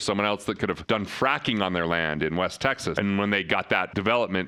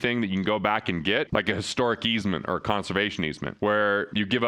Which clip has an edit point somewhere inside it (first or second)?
second